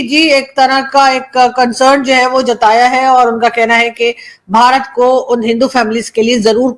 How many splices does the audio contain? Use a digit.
0